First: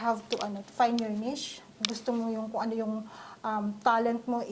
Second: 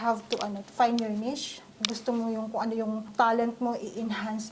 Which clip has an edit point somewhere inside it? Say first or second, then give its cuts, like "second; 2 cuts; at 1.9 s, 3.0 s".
second; 1 cut; at 3.1 s